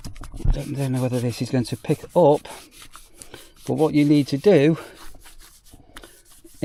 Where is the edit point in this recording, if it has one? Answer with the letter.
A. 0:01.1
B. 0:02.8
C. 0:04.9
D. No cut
D